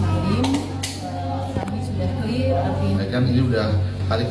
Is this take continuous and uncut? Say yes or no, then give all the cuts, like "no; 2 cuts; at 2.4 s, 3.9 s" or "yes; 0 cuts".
no; 1 cut; at 3.0 s